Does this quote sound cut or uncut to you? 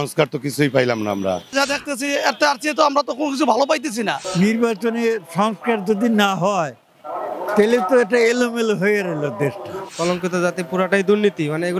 cut